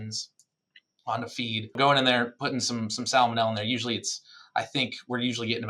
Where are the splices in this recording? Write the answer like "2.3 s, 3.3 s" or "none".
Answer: 1.7 s